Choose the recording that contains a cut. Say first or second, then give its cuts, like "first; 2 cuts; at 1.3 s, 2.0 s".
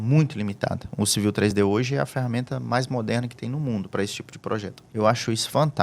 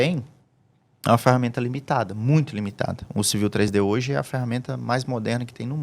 first; 1 cut; at 4.8 s